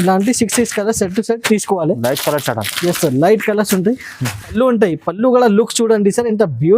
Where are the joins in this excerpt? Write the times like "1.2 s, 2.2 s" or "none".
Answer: 4.5 s

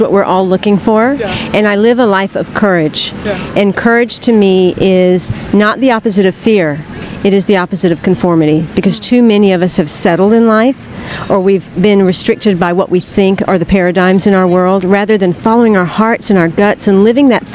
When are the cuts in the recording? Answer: none

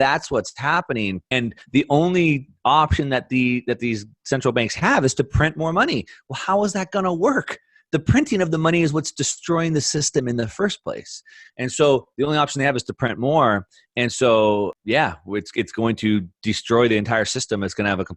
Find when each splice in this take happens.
1.3 s, 14.7 s

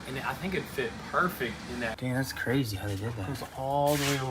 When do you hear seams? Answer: 2.0 s

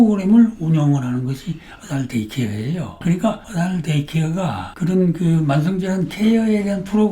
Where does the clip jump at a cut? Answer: 3.5 s

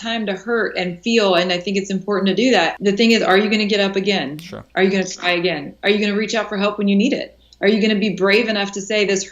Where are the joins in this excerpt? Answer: 2.7 s

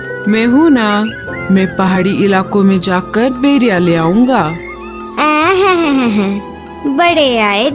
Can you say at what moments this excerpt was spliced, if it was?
none

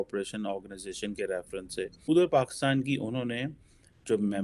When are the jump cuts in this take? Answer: 2.0 s

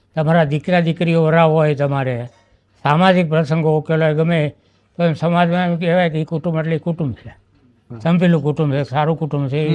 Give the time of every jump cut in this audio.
none

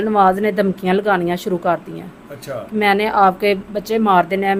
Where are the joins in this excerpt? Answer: none

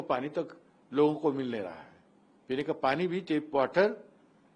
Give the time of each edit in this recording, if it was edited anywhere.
none

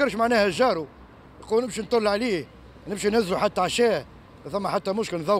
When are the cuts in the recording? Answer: none

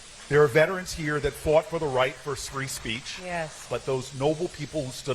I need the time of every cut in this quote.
3.7 s

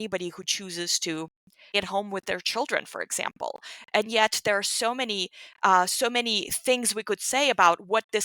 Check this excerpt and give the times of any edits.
1.7 s

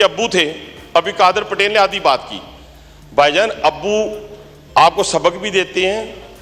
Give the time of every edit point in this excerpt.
none

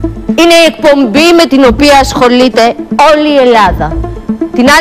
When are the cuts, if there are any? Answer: 3.6 s

